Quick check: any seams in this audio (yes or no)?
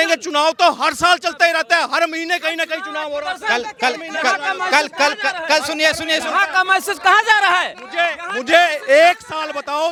no